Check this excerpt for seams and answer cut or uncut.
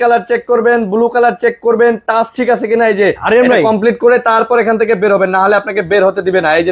uncut